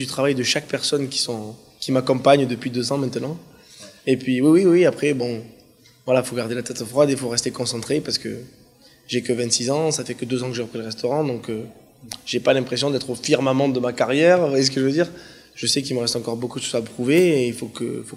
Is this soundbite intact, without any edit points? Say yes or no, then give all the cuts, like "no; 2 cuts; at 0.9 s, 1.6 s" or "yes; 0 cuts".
no; 1 cut; at 10.0 s